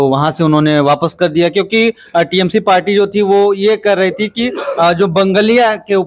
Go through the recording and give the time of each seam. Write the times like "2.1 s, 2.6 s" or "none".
none